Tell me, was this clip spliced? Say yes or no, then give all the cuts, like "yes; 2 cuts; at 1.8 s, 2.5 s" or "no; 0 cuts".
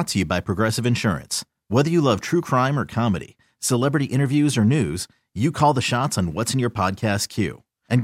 no; 0 cuts